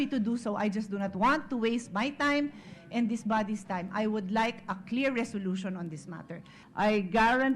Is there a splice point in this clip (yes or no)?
yes